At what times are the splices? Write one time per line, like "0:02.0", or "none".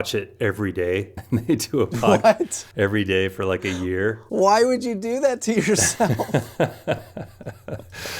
0:01.1
0:02.6
0:04.2